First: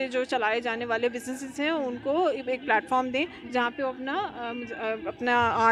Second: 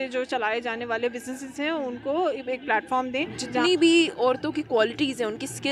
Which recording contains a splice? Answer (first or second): second